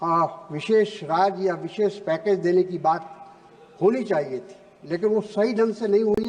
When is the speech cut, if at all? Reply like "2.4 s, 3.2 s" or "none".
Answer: none